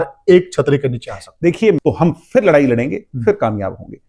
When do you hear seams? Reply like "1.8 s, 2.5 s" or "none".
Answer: 1.8 s